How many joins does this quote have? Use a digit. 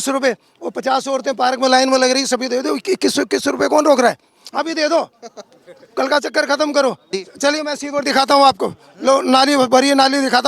1